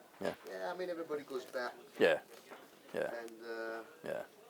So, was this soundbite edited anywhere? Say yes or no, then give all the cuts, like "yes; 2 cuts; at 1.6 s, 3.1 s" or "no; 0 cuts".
yes; 1 cut; at 2.7 s